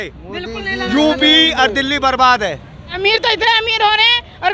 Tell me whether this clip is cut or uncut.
cut